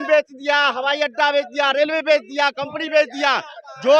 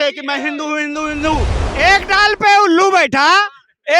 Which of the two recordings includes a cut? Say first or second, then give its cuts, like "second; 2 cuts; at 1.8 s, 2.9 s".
second; 1 cut; at 1.6 s